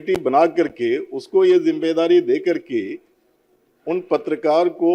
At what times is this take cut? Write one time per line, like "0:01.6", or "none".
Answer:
none